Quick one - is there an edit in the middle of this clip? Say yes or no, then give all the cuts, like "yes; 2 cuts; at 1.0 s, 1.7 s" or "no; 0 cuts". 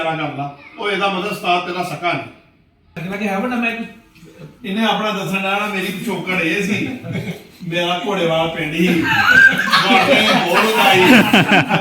yes; 1 cut; at 3.0 s